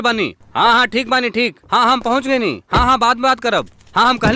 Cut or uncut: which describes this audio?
uncut